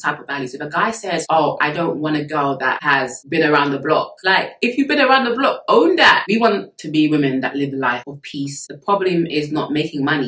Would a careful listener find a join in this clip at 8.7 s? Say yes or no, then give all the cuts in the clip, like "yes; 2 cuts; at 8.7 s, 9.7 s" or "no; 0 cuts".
yes; 3 cuts; at 2.8 s, 6.2 s, 8.7 s